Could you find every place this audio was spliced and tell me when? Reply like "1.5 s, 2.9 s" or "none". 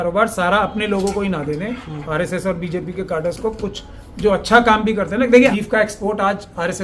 5.5 s